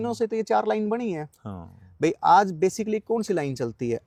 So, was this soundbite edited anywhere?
no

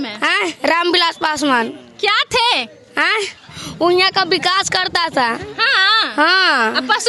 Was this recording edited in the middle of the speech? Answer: no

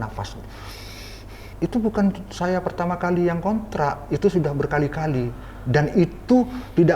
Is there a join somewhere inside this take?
yes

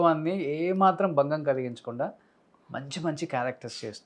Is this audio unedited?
yes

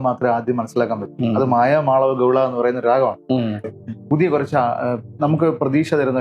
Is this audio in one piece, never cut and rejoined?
no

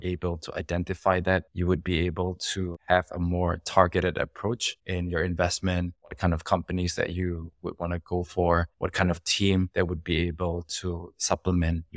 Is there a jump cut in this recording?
yes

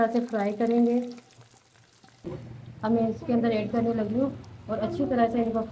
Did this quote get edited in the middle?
yes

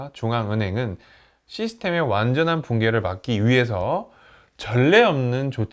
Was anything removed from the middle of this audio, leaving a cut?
no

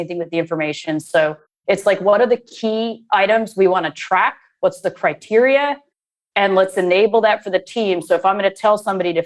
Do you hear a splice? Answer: no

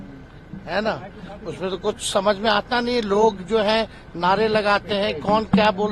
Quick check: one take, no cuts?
yes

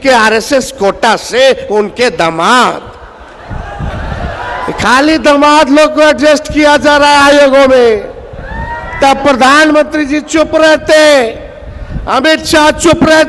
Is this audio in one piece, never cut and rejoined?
yes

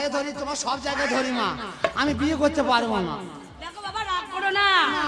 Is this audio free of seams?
yes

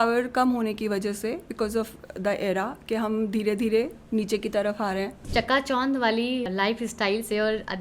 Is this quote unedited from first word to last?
no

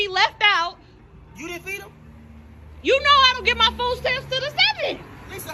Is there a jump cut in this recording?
no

